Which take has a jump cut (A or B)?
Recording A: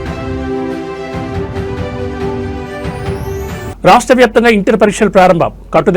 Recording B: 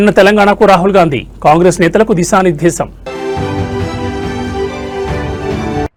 A